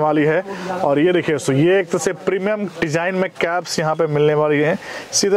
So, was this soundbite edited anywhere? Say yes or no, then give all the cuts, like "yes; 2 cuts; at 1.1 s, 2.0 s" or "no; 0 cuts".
no; 0 cuts